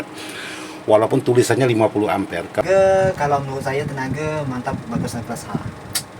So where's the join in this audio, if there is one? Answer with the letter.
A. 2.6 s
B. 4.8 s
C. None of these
A